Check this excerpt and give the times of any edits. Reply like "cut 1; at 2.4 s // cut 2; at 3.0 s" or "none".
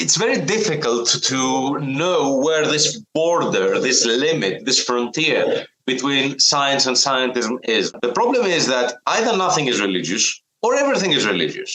cut 1; at 7.9 s